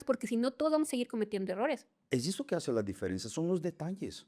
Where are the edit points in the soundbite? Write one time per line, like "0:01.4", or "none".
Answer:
0:01.9